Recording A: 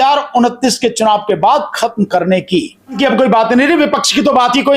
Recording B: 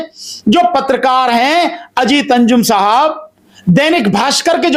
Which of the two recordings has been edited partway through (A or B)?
A